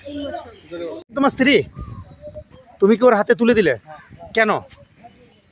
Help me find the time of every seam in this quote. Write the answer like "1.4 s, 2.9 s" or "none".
1.0 s